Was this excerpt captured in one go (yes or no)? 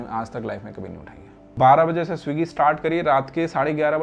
no